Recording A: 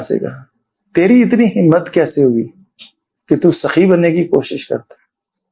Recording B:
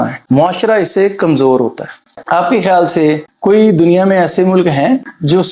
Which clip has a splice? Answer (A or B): B